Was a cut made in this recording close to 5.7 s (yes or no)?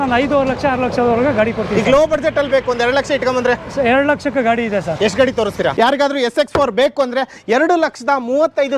yes